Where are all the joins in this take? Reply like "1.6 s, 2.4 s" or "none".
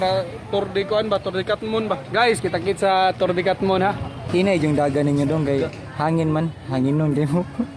2.0 s, 4.2 s